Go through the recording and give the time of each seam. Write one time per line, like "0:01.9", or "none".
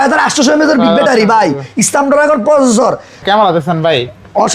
0:03.2